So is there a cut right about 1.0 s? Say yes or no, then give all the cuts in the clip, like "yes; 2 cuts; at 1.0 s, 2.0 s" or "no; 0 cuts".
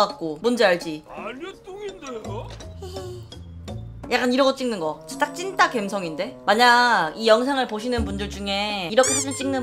yes; 1 cut; at 1.0 s